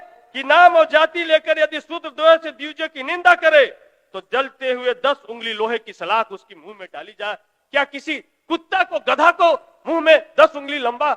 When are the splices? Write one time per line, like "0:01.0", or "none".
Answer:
none